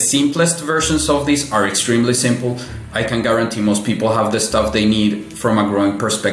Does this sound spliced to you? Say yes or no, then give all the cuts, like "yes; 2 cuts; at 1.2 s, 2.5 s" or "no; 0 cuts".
no; 0 cuts